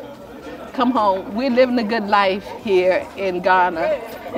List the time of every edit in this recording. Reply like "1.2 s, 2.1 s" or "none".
none